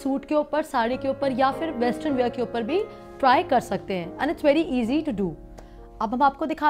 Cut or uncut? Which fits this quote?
uncut